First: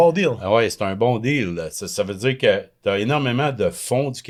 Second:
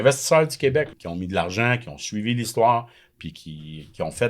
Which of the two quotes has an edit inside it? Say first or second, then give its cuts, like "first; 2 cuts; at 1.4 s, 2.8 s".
second; 1 cut; at 1.0 s